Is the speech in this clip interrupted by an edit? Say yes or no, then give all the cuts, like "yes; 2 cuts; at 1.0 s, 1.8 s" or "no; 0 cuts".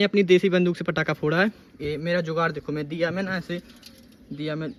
no; 0 cuts